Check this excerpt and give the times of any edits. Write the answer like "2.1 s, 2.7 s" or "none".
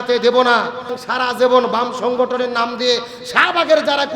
0.9 s